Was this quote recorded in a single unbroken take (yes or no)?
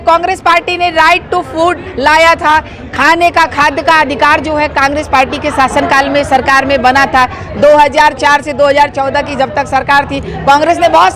yes